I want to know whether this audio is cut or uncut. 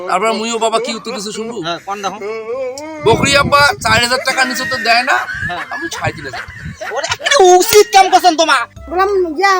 cut